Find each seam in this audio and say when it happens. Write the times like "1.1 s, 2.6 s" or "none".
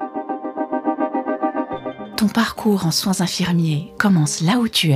2.0 s, 3.9 s